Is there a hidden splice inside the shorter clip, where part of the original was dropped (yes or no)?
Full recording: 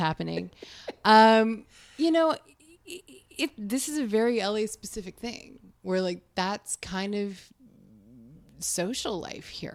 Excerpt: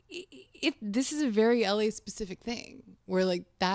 no